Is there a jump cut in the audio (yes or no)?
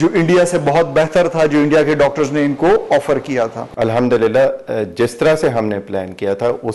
yes